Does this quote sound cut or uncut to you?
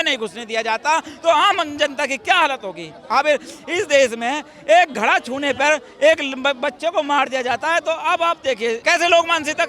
cut